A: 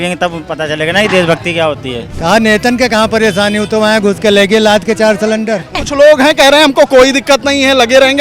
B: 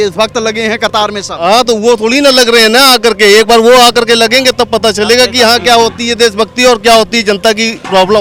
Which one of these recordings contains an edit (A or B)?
A